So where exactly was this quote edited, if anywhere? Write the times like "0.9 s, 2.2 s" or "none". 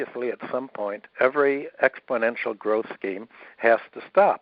1.0 s

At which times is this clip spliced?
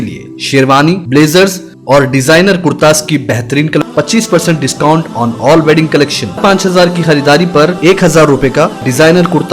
3.8 s, 6.4 s

